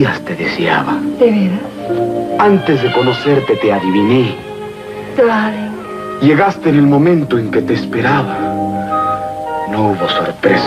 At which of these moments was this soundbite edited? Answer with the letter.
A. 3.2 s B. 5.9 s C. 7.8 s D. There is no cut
D